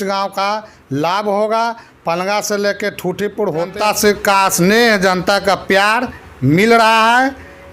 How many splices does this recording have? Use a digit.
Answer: 1